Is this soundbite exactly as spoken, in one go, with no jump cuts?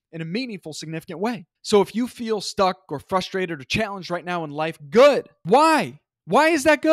no; 2 cuts; at 1.5 s, 5.3 s

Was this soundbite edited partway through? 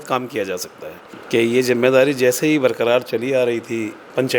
yes; 1 cut; at 1.0 s

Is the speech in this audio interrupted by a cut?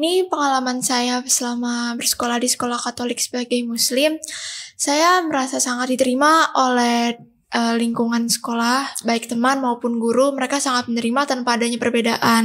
no; 0 cuts

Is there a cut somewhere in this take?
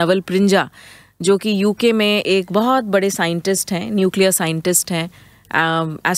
no; 0 cuts

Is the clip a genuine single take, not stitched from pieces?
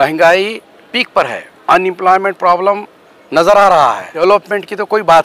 no; 2 cuts; at 1.5 s, 4.1 s

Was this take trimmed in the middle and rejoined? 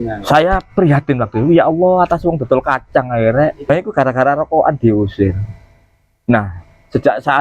yes; 1 cut; at 3.7 s

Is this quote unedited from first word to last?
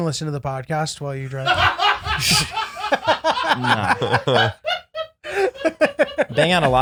yes; 0 cuts

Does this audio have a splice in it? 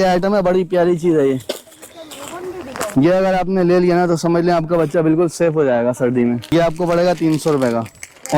yes; 1 cut; at 6.5 s

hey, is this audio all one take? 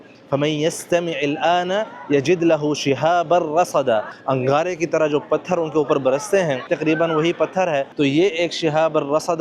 no; 3 cuts; at 4.1 s, 6.7 s, 7.9 s

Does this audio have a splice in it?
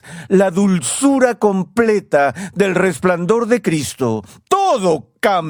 no; 0 cuts

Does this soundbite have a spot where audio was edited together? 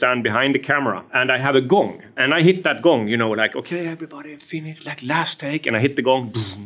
yes; 2 cuts; at 1.1 s, 2.1 s

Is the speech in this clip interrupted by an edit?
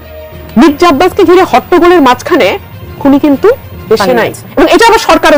no; 0 cuts

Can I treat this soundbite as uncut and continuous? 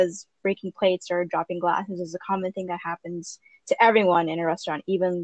yes; 0 cuts

